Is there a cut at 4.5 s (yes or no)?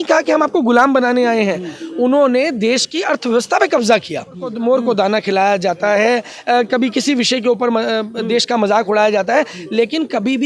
yes